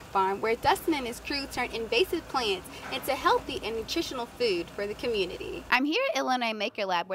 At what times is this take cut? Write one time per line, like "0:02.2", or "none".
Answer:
0:05.6